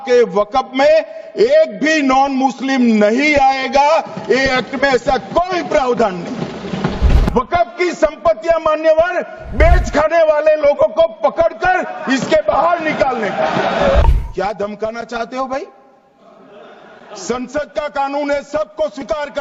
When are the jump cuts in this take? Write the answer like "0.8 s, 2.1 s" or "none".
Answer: 7.2 s, 14.0 s